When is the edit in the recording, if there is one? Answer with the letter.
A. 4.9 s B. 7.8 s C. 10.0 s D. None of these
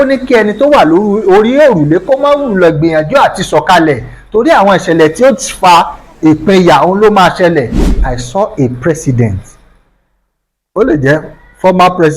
B